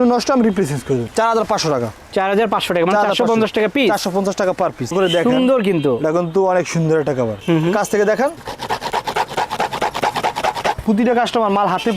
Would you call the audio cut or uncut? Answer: cut